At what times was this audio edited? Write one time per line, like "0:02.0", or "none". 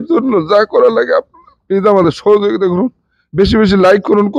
none